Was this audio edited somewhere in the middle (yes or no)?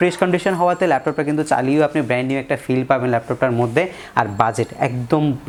no